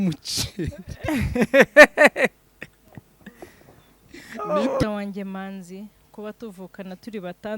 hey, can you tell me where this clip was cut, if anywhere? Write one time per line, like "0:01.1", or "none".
0:04.8